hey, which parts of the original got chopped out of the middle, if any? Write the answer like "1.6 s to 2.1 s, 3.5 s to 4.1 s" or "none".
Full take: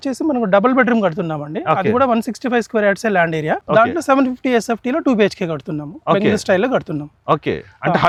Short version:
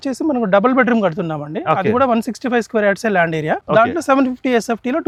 none